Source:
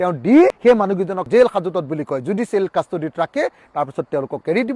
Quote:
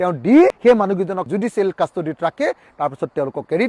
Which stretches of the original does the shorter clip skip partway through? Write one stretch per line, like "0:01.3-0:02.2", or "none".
0:01.2-0:02.2